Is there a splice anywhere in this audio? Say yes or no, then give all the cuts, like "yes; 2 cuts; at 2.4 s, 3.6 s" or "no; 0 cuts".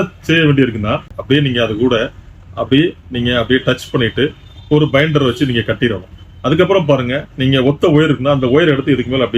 yes; 1 cut; at 1.1 s